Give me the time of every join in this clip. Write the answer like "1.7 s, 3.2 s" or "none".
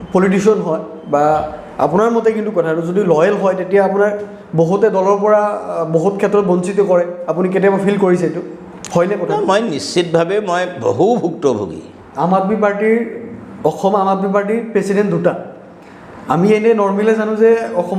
12.1 s